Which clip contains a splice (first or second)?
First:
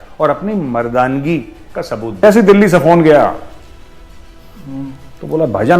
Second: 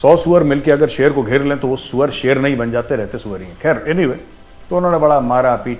first